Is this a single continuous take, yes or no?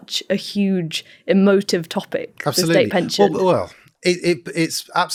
yes